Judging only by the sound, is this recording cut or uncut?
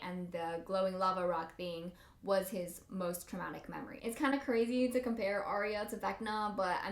cut